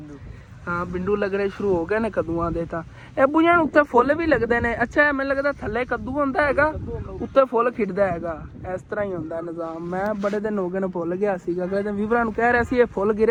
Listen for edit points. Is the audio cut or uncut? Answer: uncut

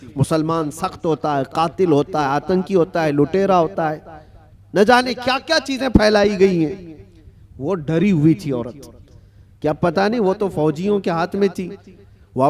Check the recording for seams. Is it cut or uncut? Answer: uncut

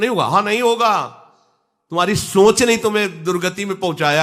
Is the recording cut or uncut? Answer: uncut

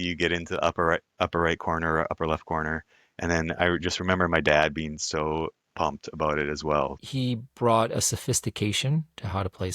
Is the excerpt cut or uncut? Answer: cut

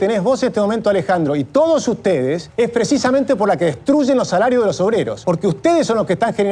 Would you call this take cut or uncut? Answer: cut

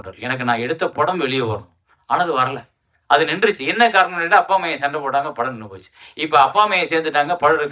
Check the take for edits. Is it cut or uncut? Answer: uncut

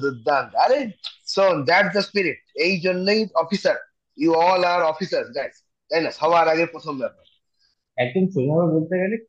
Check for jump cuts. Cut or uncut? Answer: cut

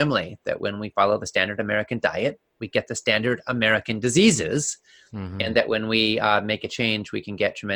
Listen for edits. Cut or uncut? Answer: uncut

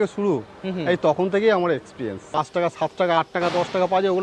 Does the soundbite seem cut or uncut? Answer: cut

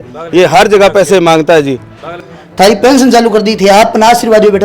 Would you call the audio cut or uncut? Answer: cut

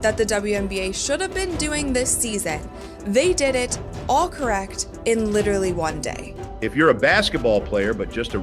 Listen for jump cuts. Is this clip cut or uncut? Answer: cut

